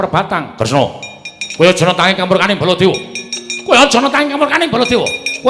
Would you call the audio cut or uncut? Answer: uncut